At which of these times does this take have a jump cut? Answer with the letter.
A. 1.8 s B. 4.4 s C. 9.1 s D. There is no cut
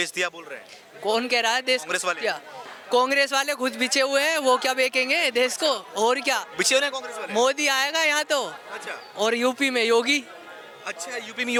D